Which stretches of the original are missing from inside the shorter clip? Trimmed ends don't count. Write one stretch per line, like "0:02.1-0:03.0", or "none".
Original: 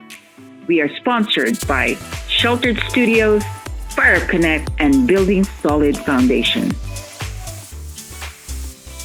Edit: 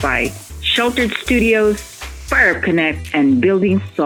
none

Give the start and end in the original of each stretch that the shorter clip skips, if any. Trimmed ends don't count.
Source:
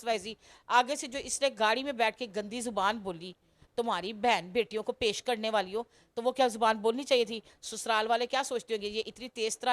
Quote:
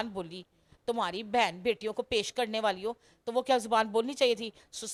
none

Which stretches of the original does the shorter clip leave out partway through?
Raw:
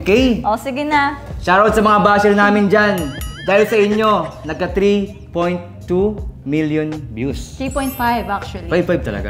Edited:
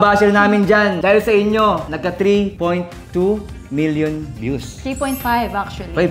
0:03.0-0:03.4
0:04.7-0:05.0

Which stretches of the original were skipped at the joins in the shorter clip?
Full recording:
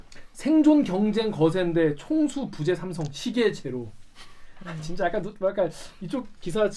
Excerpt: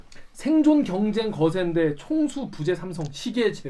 none

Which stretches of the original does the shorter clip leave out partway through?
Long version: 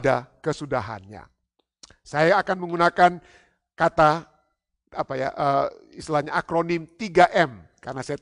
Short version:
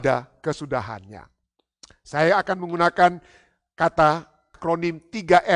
0:04.5-0:06.4

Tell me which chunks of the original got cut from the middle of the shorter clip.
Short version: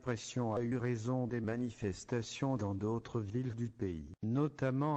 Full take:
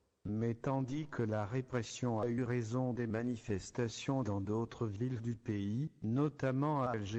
0:05.5-0:05.7

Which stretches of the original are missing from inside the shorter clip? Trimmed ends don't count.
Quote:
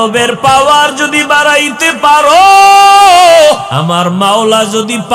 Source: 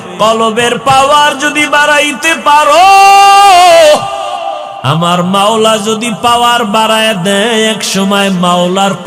0:04.1-0:04.8

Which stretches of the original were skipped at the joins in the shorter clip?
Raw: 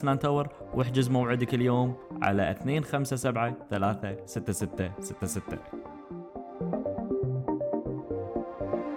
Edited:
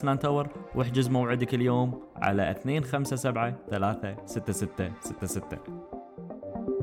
0:05.4-0:05.9

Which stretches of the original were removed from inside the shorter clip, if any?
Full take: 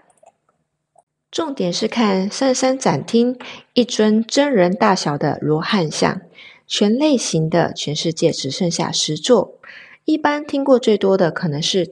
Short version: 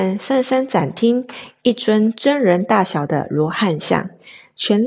none

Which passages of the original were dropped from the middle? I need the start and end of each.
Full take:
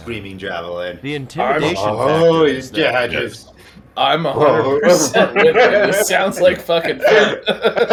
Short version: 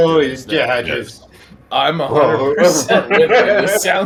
none

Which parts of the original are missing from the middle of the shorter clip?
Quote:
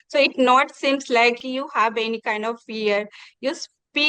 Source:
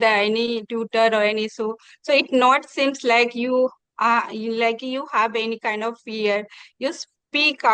0:03.3-0:04.8

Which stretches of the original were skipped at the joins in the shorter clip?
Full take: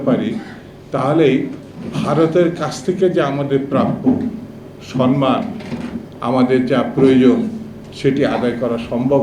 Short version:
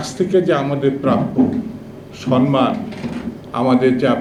none

